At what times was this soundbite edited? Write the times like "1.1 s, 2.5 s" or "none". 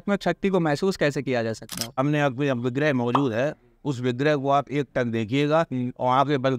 1.9 s